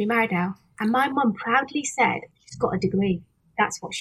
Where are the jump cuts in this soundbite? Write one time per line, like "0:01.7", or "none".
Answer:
0:02.4